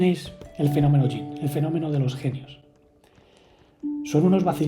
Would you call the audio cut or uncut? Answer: uncut